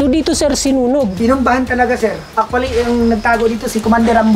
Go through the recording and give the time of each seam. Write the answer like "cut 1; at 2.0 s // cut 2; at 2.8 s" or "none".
cut 1; at 1.1 s // cut 2; at 2.2 s